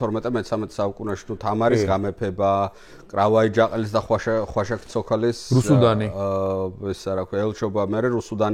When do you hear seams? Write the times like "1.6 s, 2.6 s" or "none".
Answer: none